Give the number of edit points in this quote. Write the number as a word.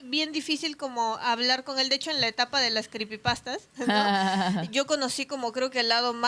zero